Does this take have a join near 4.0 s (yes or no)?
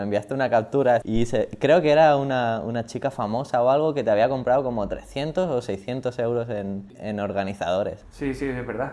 no